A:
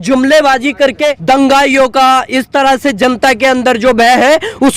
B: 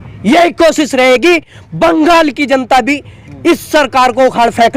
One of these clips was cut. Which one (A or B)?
A